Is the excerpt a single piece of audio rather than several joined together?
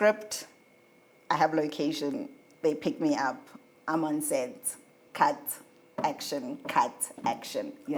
yes; 0 cuts

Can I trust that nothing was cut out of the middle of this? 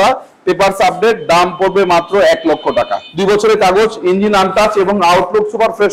no; 1 cut; at 3.1 s

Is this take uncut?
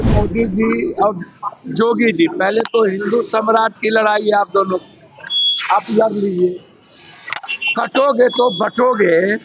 yes; 0 cuts

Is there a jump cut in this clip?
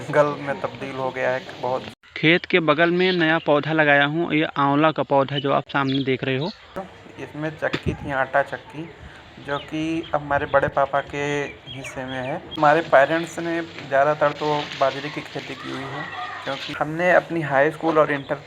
yes; 4 cuts; at 1.9 s, 6.9 s, 12.6 s, 16.7 s

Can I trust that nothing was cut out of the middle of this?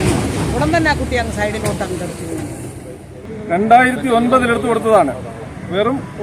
no; 1 cut; at 3.2 s

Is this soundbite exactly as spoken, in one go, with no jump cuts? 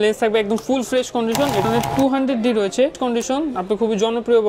no; 2 cuts; at 1.6 s, 3.0 s

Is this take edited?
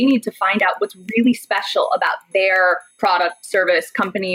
no; 0 cuts

